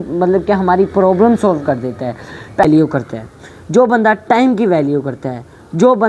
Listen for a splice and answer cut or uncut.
cut